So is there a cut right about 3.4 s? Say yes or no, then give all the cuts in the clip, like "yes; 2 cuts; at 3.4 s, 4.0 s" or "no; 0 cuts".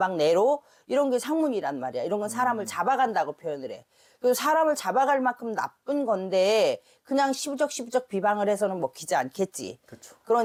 no; 0 cuts